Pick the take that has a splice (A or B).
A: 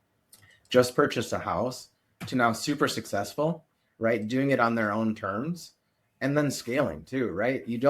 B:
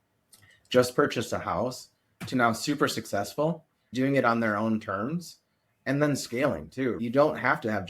B